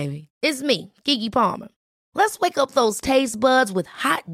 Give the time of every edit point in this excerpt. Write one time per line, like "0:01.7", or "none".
none